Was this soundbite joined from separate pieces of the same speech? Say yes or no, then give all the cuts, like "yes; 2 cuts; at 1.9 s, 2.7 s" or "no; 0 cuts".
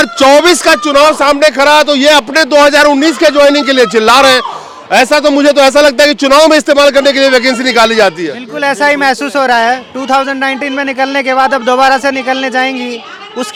no; 0 cuts